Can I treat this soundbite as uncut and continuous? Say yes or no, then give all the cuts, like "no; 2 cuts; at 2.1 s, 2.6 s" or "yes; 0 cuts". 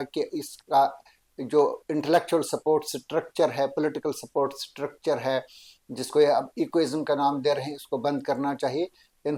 yes; 0 cuts